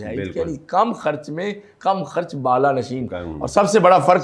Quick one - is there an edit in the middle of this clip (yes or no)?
no